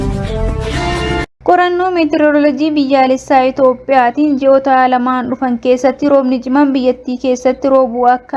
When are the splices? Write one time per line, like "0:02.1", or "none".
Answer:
0:01.3